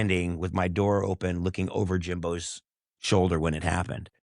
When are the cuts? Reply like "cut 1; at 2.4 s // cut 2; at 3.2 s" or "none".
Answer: none